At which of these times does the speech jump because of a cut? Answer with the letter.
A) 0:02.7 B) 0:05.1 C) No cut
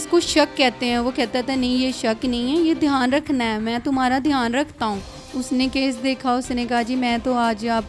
B